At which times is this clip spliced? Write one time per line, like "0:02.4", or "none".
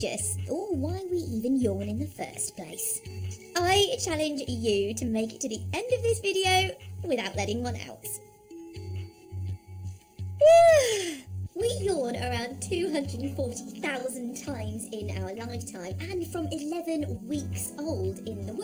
none

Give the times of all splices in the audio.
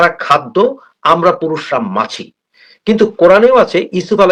none

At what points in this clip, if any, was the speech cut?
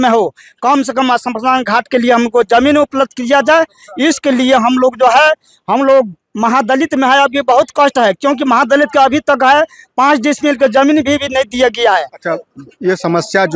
none

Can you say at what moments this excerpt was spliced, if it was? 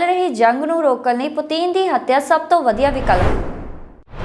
none

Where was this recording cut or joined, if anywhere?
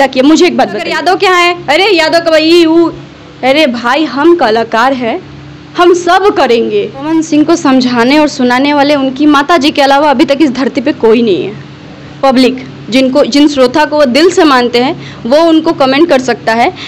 0:00.9
0:07.1

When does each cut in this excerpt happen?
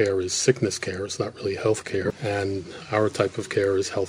0:02.1

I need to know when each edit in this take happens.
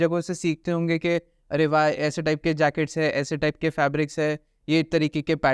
0:04.6

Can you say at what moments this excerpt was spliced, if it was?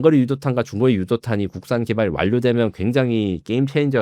none

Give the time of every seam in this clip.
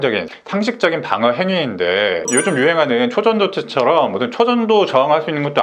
0:02.2

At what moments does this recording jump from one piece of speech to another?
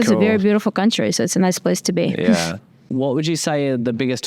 none

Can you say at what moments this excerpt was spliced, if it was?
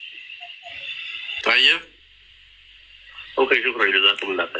0:01.3

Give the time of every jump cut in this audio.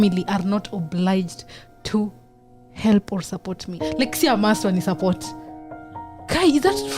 0:03.7

